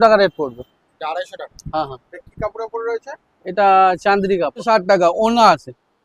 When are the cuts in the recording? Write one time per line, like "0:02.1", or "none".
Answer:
0:04.6